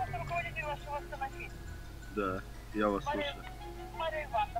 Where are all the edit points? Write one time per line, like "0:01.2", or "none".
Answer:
none